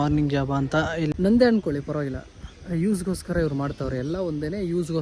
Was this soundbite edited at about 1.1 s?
yes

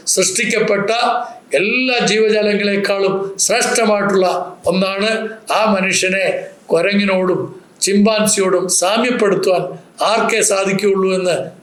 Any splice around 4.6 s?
no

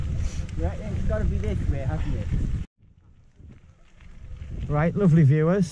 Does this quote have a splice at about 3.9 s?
no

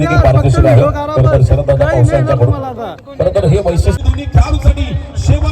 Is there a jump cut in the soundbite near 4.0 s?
yes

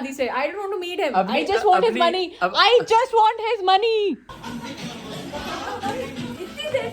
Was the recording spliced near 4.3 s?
yes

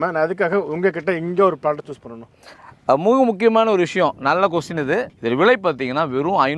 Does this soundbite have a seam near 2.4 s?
no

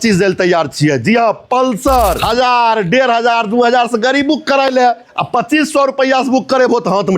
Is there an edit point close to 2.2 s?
yes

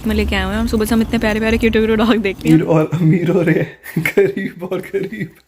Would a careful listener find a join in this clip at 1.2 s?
no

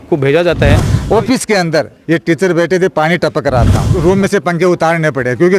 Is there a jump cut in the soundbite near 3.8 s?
yes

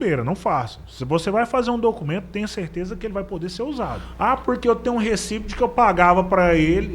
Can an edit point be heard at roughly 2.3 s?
no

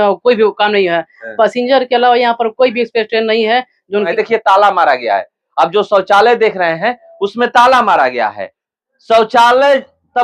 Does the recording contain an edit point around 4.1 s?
yes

